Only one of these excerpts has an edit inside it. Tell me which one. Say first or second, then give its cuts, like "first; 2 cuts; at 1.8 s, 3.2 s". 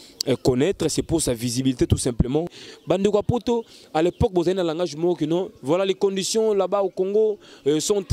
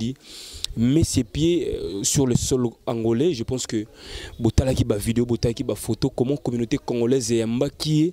first; 1 cut; at 2.5 s